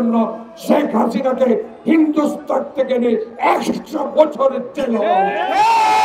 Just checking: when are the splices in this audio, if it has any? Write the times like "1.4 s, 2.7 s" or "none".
none

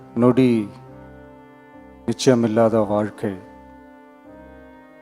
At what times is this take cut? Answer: 0.7 s, 2.1 s, 3.4 s

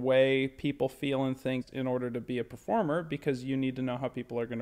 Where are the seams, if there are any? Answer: 1.7 s

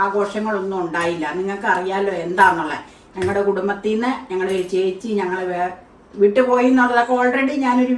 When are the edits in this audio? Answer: none

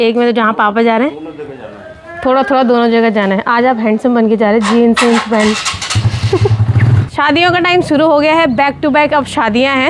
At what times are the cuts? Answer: none

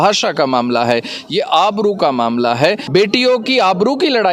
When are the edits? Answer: 2.8 s

